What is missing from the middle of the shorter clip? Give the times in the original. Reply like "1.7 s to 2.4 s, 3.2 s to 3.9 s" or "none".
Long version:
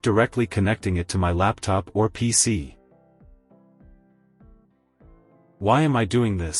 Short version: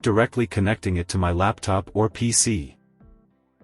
2.7 s to 4.1 s